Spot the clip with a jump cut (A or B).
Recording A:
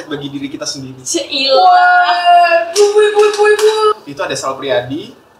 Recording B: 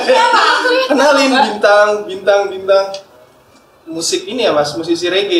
A